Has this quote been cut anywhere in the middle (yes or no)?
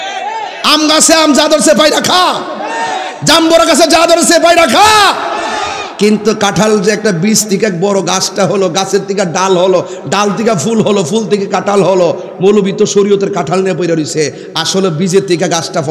no